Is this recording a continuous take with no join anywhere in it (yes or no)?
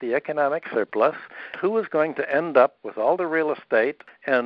no